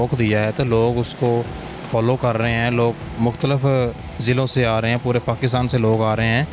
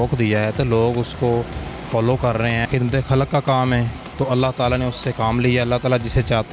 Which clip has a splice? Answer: second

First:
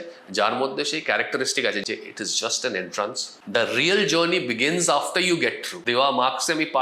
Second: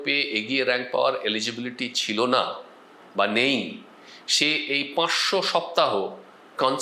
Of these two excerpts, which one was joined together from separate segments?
first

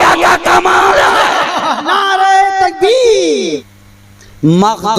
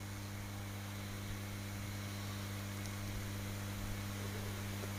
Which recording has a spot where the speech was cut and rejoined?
first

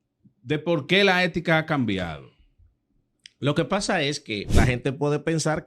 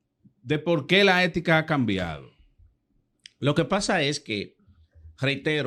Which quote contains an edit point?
first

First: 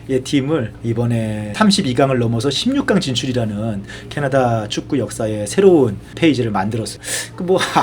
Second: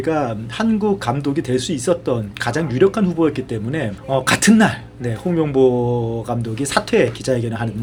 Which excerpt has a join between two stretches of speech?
first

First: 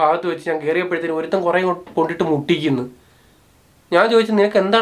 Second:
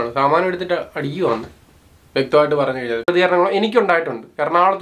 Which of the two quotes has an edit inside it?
second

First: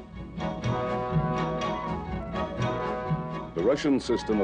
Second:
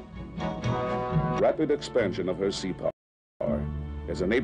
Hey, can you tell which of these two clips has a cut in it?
first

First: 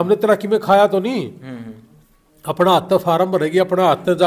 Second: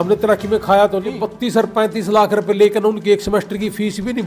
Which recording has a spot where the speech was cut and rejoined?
second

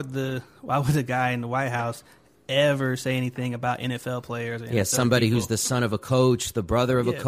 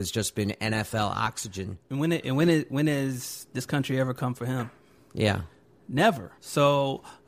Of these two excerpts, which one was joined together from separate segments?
second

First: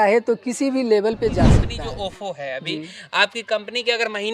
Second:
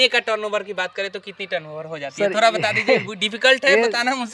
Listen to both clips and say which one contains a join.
first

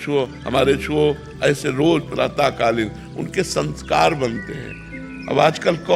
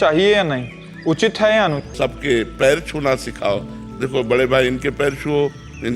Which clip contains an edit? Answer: second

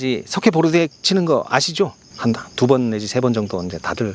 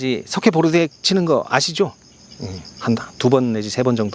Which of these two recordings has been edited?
first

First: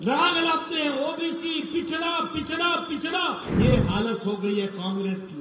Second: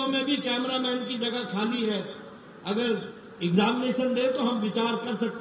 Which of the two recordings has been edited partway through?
first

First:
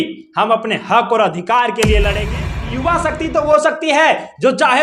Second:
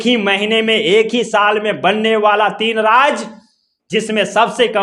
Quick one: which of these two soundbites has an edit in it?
first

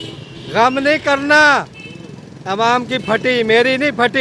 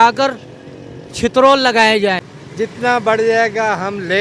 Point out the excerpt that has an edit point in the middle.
second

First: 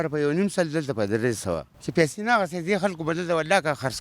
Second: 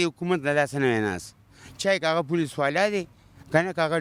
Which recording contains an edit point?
first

